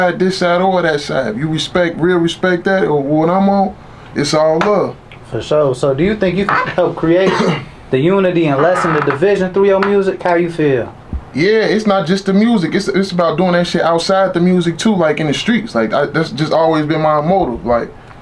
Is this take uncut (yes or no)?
yes